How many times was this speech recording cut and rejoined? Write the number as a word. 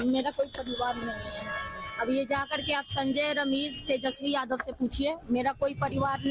one